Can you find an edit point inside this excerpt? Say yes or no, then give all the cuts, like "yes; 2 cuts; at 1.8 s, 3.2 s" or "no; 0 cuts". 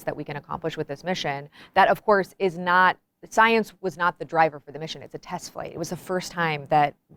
no; 0 cuts